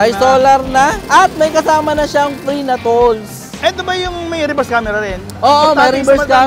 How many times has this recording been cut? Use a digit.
1